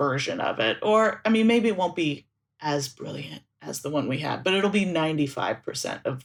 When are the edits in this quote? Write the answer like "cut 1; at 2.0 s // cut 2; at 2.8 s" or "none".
none